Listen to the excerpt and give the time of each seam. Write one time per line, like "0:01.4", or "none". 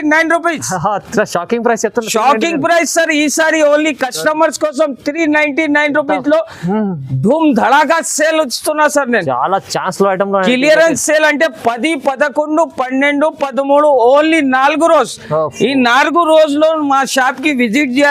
none